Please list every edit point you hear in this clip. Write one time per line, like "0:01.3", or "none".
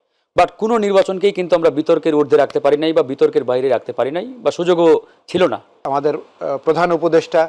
0:05.9